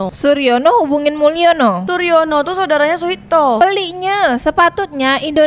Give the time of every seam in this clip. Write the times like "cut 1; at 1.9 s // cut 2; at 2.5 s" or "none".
cut 1; at 3.6 s